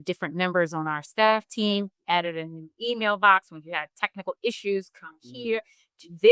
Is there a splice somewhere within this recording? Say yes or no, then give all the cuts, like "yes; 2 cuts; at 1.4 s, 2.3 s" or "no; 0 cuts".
no; 0 cuts